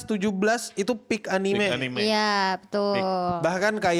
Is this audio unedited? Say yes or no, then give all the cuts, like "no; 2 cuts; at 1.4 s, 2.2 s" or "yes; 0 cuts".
yes; 0 cuts